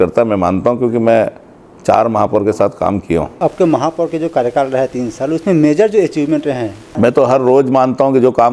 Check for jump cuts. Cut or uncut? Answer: cut